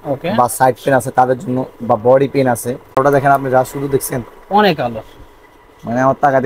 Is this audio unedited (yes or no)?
no